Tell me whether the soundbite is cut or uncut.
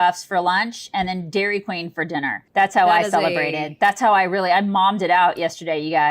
cut